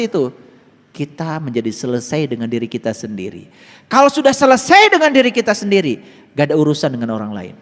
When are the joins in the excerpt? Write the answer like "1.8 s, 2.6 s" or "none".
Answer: none